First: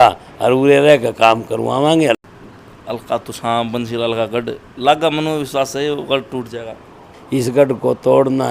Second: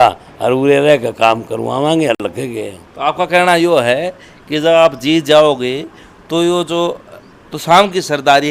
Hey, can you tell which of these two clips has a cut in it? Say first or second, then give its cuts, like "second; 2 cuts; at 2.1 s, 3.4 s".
first; 2 cuts; at 2.2 s, 7.1 s